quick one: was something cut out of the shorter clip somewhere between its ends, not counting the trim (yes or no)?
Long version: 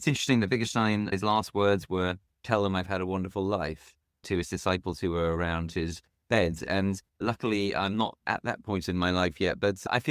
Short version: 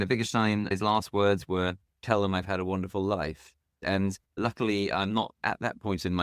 yes